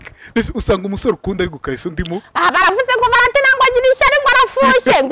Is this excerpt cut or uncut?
uncut